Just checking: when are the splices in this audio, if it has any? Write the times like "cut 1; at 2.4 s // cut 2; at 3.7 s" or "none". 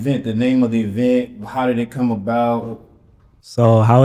none